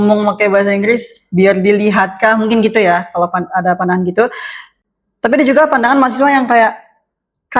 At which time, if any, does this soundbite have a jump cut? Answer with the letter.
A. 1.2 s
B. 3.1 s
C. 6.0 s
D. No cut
D